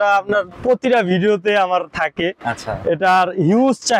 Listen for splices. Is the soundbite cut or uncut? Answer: uncut